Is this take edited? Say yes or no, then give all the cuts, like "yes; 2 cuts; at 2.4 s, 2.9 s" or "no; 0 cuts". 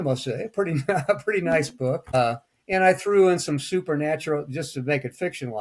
yes; 1 cut; at 2.1 s